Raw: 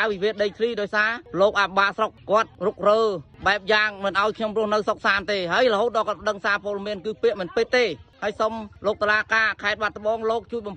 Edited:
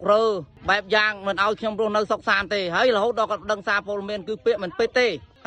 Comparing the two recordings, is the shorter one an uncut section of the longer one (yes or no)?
yes